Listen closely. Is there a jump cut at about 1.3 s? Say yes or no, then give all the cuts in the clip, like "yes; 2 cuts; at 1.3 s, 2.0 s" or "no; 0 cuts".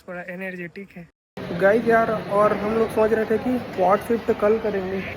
yes; 1 cut; at 1.3 s